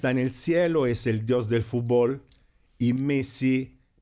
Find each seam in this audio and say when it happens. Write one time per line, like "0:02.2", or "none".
none